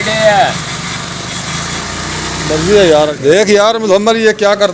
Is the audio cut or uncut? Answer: cut